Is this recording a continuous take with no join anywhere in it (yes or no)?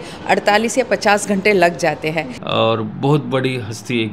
no